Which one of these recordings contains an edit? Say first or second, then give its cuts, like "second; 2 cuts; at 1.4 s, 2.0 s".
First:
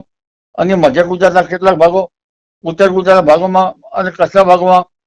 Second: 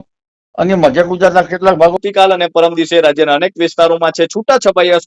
second; 1 cut; at 2.0 s